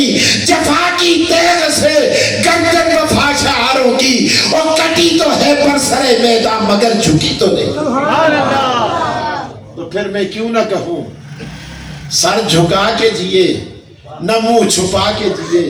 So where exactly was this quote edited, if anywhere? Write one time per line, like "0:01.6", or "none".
none